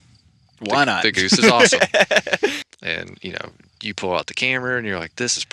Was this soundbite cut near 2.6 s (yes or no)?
yes